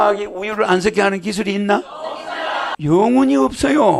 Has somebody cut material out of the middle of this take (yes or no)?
no